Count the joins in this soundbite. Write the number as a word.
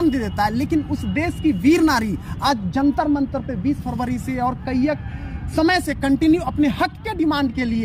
zero